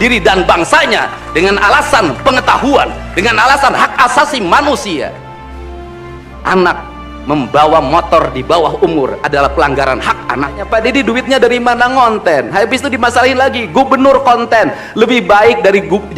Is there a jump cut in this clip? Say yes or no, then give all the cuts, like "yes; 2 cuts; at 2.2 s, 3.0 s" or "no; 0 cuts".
yes; 1 cut; at 10.6 s